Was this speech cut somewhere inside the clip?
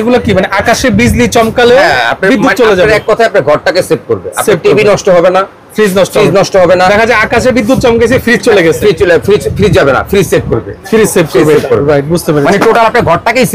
no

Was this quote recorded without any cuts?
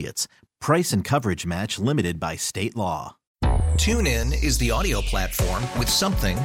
no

